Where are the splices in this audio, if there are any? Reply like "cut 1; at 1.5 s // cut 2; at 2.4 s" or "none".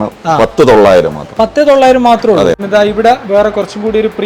cut 1; at 2.6 s